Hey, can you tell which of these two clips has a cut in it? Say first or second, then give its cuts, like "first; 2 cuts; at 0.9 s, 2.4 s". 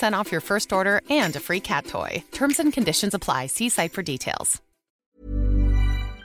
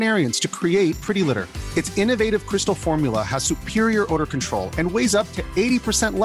first; 1 cut; at 5.0 s